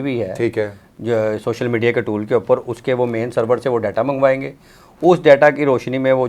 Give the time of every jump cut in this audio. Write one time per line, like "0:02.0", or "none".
none